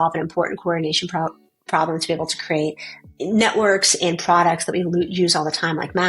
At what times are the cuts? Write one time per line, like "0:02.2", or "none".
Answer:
0:02.9